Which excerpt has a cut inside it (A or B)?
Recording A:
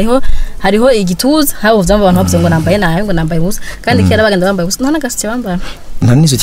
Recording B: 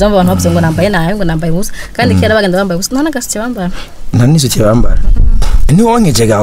B